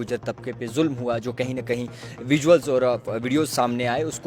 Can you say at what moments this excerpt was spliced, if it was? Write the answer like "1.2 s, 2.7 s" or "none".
none